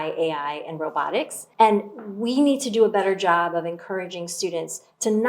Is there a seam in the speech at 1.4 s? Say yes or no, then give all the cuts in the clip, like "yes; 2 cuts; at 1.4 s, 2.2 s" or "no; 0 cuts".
yes; 1 cut; at 1.4 s